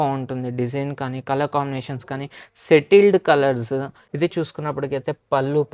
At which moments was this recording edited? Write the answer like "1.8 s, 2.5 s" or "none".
4.0 s